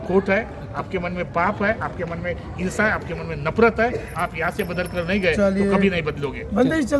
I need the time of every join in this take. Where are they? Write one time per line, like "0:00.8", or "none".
none

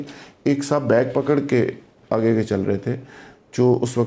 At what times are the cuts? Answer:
none

